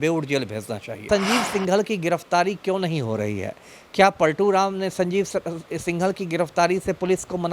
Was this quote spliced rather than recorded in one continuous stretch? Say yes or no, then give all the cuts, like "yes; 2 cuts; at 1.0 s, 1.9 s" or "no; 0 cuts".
yes; 1 cut; at 1.0 s